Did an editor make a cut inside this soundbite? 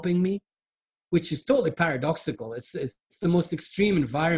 no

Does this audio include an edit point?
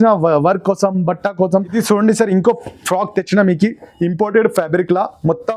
yes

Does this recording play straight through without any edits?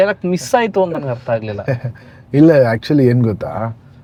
yes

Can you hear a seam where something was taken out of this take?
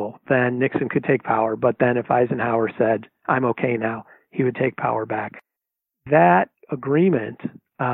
no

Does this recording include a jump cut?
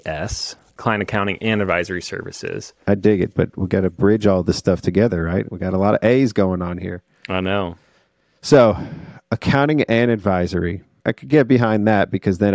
yes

